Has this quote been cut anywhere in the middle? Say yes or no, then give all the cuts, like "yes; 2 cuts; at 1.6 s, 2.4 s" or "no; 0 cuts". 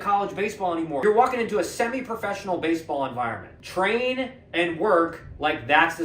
yes; 2 cuts; at 1.0 s, 3.5 s